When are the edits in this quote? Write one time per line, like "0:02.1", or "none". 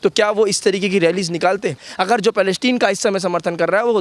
0:01.9

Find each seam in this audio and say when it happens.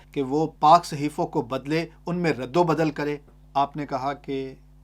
0:03.3

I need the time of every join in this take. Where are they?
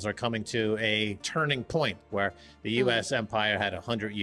0:02.0

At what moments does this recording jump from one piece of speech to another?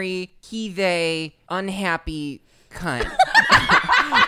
none

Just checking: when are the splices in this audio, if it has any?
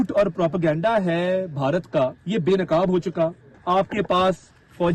0:02.2
0:03.5

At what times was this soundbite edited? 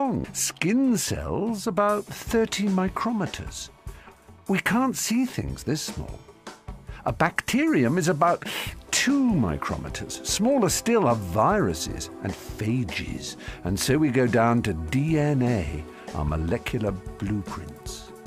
0:13.6

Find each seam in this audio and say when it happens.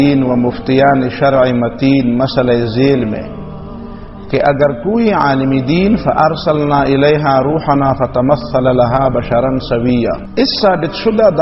0:10.2

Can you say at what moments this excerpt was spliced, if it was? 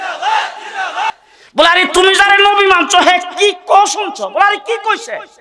0:01.2

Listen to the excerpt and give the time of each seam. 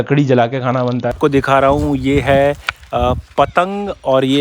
0:01.1

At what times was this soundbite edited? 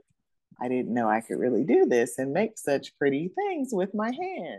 none

